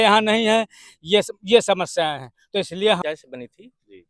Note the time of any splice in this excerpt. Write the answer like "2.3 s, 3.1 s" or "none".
3.0 s